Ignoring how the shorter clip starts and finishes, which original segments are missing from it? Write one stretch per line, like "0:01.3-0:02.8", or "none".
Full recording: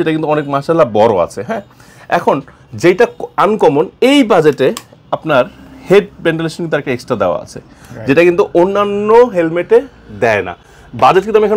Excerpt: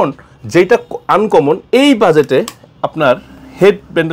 none

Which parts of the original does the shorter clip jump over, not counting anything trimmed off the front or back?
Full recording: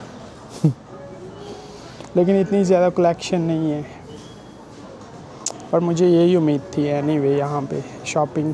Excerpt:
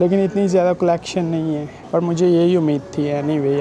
0:03.9-0:05.5

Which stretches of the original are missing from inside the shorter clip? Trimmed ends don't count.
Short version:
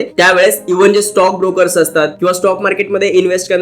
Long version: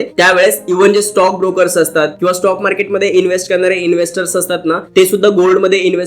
none

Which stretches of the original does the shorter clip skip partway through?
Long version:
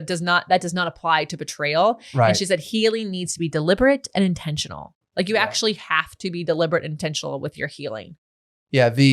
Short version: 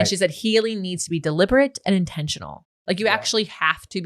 none

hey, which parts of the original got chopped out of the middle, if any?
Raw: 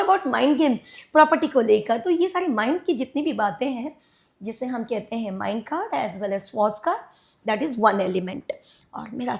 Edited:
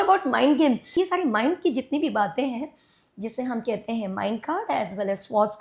0:00.9-0:02.2

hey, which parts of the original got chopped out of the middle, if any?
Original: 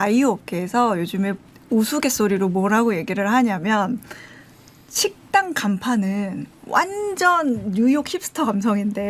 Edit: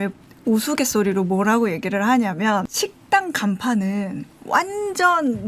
0:03.9-0:04.9

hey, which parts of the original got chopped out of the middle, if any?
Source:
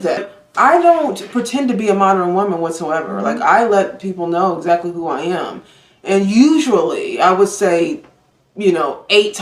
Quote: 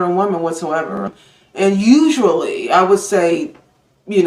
0:03.2-0:05.5

